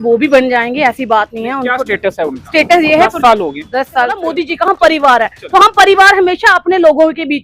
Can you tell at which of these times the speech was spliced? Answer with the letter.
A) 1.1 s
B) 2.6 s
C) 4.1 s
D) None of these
C